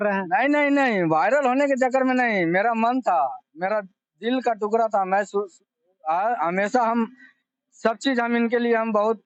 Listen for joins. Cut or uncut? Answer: uncut